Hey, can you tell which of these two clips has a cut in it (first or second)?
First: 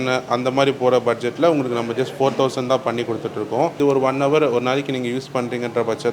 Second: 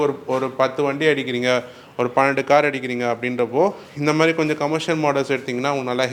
first